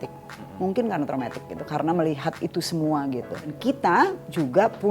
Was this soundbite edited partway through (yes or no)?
yes